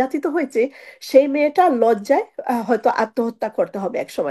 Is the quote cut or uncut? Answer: uncut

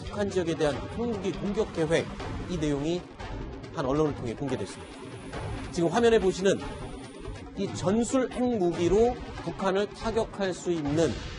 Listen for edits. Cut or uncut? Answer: uncut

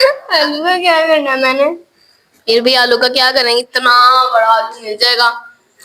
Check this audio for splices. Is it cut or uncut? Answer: uncut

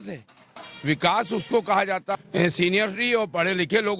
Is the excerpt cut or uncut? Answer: cut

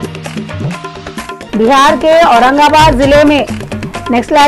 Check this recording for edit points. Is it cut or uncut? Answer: cut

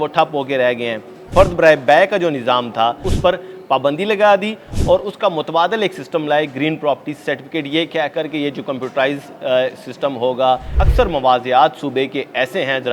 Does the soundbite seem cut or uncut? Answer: cut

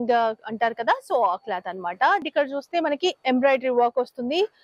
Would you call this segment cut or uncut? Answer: cut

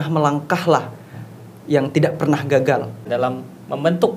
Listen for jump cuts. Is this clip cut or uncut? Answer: cut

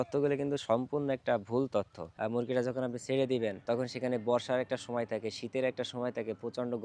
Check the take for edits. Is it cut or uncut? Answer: cut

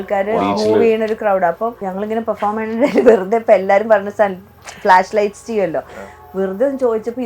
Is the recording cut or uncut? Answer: cut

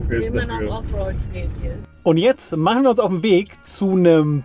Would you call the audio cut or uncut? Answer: cut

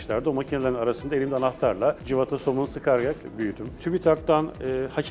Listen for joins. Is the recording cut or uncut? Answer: cut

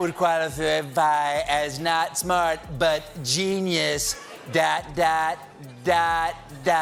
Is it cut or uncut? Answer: uncut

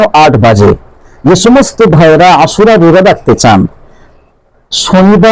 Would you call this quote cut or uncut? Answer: uncut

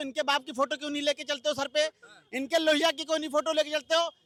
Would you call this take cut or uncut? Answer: uncut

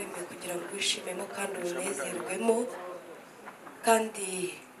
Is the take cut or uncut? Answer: uncut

